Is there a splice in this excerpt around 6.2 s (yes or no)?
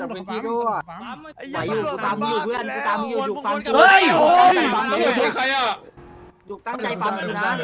no